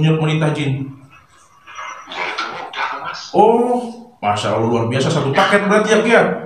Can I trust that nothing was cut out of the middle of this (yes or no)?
yes